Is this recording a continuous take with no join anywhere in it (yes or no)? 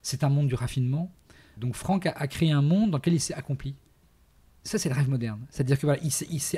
no